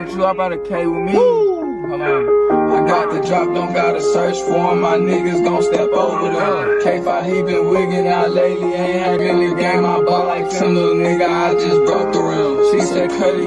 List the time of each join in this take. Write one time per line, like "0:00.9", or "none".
none